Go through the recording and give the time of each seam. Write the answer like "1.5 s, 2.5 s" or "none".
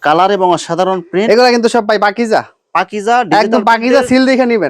none